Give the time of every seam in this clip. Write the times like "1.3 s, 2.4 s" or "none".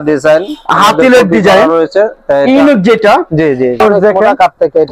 3.8 s